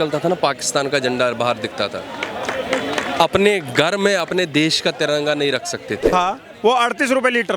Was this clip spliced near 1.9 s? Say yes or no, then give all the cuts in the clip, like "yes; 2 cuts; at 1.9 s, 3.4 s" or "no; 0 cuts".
no; 1 cut; at 6.1 s